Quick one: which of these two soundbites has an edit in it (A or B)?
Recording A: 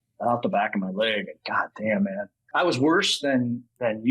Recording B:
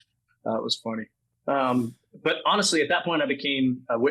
A